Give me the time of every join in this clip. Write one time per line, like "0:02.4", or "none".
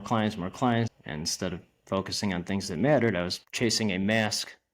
0:00.9
0:03.4